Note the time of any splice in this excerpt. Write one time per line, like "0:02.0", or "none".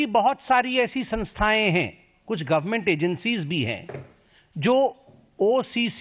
0:03.8